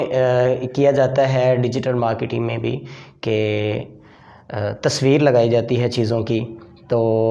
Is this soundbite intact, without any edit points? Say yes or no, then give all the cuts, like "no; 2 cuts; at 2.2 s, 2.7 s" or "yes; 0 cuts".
yes; 0 cuts